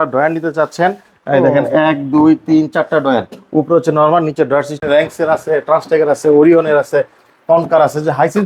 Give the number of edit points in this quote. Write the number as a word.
one